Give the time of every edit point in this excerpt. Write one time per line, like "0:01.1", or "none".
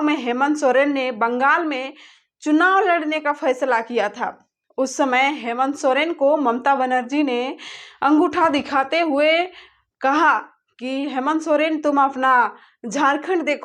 none

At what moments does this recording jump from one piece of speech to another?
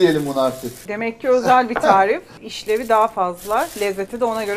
0:00.9
0:02.4

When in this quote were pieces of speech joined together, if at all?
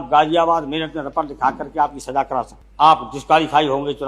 0:02.5

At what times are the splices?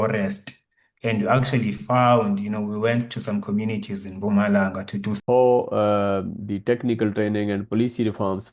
0:05.2

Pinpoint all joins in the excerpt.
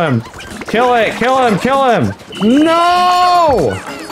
0:02.2

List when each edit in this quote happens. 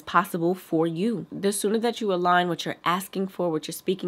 none

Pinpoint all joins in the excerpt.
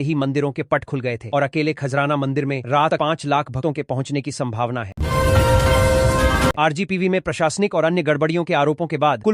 0:04.9
0:06.6

